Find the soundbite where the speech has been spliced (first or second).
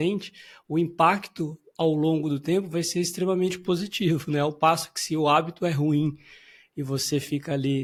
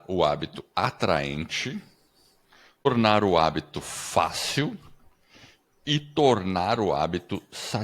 second